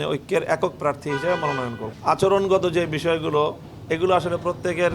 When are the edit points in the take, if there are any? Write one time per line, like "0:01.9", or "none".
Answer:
0:01.8